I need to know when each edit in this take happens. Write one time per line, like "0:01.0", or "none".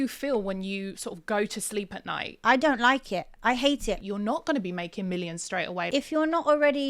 0:02.2
0:04.0
0:05.9

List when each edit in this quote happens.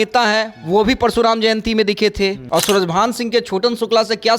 0:02.4

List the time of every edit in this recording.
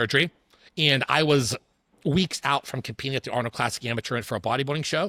none

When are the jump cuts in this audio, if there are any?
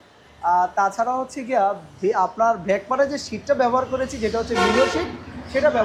none

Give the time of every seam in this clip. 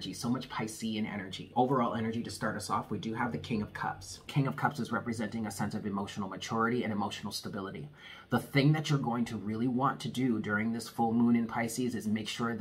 0:01.4
0:04.3

